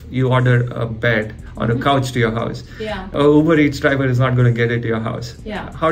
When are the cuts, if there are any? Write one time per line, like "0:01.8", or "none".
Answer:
none